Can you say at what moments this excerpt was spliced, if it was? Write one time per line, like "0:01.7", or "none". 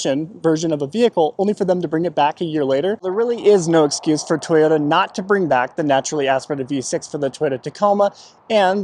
0:03.0